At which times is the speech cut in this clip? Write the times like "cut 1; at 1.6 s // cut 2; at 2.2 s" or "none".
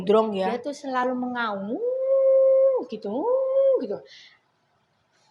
cut 1; at 1.0 s